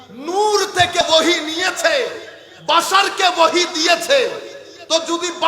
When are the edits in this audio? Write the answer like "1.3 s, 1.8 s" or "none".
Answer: 1.0 s